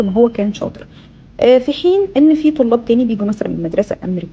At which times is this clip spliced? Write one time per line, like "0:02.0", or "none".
none

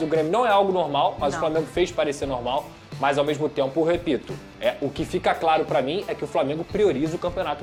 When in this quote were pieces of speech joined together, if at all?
none

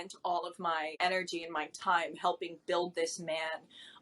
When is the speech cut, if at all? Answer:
0:00.9

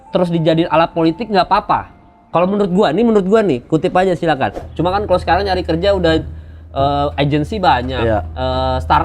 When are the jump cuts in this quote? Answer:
0:04.6

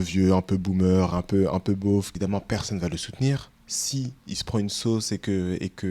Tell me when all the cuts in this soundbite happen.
0:02.1

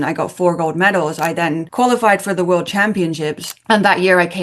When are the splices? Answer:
0:01.7

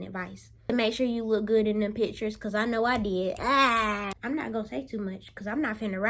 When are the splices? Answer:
0:00.7
0:04.1

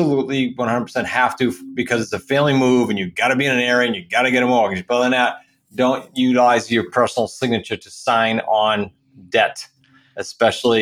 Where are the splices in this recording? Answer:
none

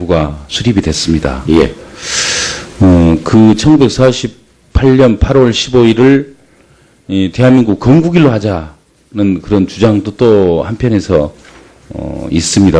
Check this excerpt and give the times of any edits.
0:10.5

